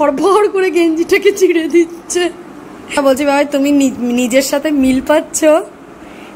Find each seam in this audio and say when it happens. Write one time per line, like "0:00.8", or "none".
0:03.0